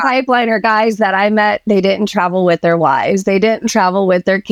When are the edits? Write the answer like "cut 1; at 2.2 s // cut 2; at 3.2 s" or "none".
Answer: none